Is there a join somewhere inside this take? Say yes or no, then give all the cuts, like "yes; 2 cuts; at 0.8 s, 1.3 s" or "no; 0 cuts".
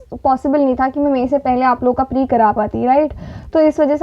no; 0 cuts